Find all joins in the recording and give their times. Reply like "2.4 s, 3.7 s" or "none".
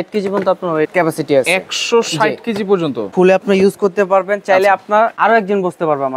0.9 s, 3.1 s, 5.1 s